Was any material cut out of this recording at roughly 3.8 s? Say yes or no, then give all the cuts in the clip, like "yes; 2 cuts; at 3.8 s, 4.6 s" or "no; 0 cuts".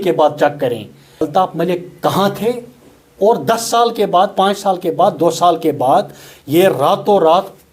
no; 1 cut; at 1.3 s